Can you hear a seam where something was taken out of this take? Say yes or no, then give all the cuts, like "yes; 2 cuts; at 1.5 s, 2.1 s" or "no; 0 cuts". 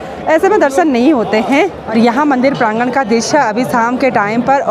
no; 0 cuts